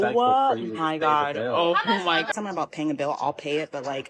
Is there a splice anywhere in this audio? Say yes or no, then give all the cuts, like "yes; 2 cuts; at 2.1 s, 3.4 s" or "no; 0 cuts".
yes; 1 cut; at 2.3 s